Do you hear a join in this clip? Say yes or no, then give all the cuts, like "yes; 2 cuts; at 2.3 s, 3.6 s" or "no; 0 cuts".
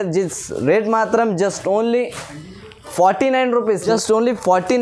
no; 0 cuts